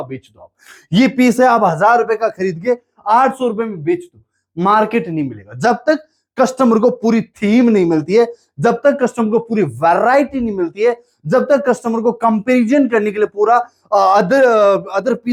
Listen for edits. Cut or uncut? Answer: uncut